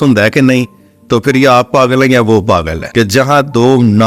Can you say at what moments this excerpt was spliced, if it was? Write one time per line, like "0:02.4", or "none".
0:02.8

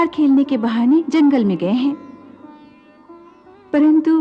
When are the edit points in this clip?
none

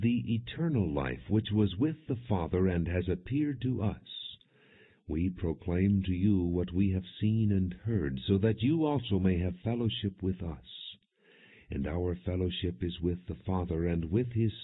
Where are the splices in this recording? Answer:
0:03.3

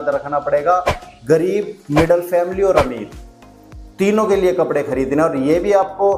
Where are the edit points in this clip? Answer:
none

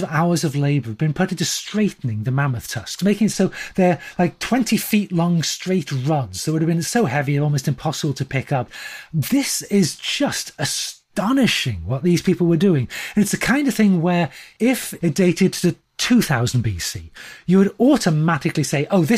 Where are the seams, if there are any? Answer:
0:08.8
0:14.5

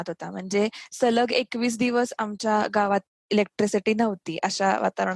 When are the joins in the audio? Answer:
0:03.1

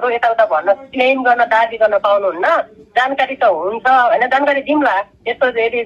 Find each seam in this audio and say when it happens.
none

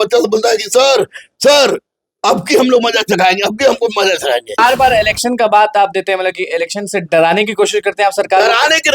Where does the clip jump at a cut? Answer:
0:04.6

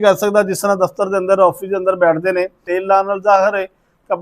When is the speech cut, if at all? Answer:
0:02.6

